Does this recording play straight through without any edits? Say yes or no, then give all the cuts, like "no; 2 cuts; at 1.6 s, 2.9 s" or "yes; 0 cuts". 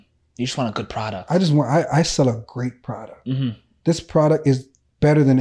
yes; 0 cuts